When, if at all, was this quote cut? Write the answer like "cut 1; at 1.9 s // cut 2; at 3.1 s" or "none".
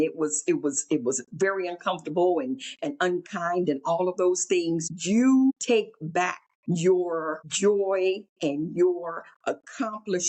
cut 1; at 4.9 s // cut 2; at 6.1 s // cut 3; at 7.4 s // cut 4; at 8.3 s